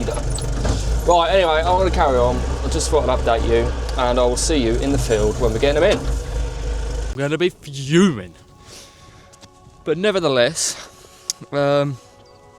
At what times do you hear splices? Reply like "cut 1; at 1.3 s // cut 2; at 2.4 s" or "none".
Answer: cut 1; at 7.1 s

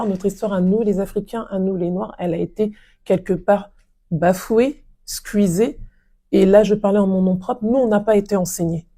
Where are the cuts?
none

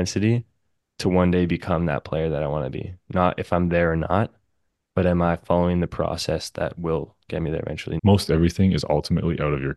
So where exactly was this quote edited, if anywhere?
cut 1; at 7.9 s

